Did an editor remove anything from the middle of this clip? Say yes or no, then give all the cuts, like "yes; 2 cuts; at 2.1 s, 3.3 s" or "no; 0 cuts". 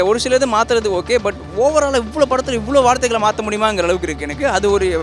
no; 0 cuts